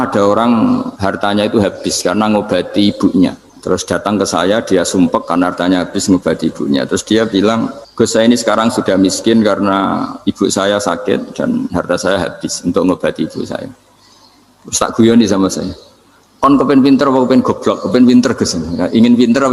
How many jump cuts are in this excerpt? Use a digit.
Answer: 3